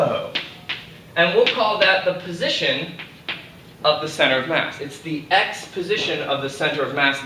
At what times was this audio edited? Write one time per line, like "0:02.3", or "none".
none